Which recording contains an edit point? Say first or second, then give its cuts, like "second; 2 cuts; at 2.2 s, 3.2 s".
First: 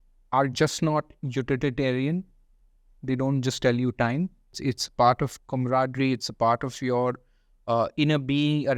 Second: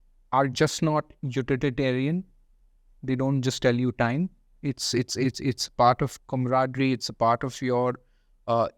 first; 1 cut; at 4.6 s